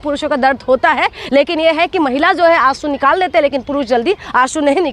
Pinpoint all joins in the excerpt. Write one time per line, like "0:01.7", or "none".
none